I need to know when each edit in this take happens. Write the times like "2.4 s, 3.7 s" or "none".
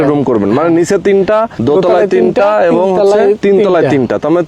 1.5 s, 3.4 s